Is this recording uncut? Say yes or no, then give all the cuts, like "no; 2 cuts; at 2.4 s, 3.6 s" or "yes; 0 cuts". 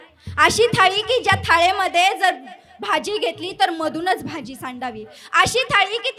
yes; 0 cuts